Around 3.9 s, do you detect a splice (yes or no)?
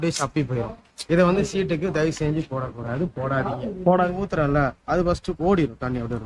yes